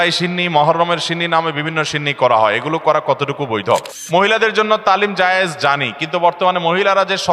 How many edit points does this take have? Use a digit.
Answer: 1